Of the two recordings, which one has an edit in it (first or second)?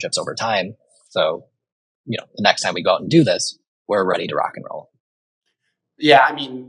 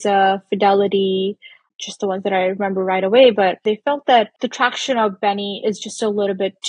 second